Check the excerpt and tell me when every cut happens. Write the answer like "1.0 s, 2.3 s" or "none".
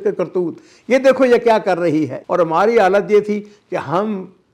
2.2 s